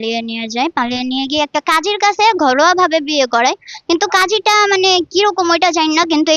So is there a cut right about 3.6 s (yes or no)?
no